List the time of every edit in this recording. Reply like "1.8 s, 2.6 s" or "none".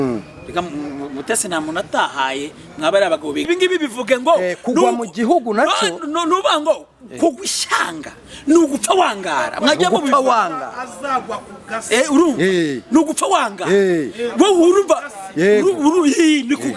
3.5 s